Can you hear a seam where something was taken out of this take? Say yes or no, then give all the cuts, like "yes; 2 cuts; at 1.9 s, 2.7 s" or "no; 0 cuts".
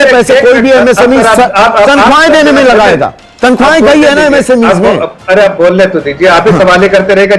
no; 0 cuts